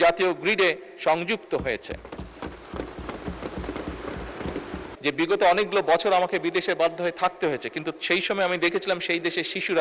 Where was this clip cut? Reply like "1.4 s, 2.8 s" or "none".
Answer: 4.9 s